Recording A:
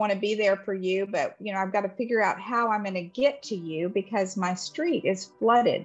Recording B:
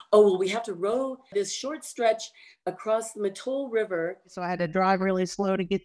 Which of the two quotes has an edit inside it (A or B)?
B